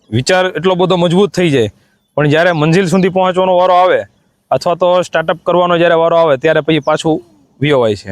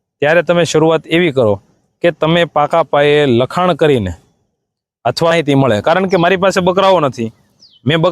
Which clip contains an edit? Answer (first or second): second